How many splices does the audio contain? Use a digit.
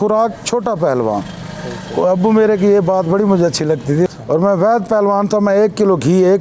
1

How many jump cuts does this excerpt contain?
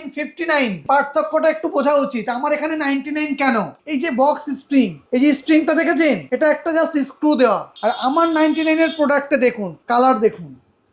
6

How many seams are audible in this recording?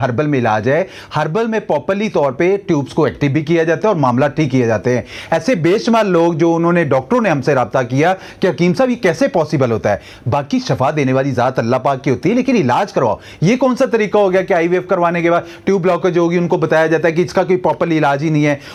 0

